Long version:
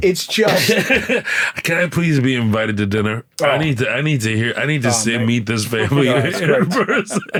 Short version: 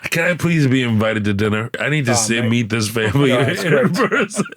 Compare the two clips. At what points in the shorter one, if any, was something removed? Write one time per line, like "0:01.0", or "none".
0:01.8